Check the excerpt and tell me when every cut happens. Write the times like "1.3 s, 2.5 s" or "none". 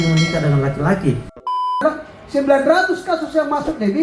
1.5 s